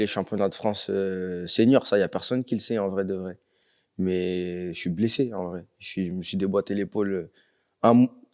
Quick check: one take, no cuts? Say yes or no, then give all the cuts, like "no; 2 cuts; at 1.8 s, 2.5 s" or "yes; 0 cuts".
yes; 0 cuts